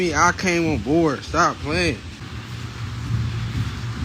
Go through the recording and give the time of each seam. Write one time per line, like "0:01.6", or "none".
0:02.1